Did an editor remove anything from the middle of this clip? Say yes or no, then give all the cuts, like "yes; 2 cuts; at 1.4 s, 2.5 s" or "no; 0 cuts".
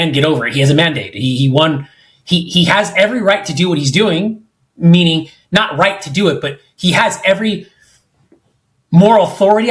no; 0 cuts